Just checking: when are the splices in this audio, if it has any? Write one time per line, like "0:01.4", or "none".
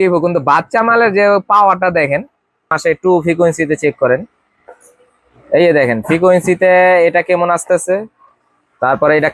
0:02.8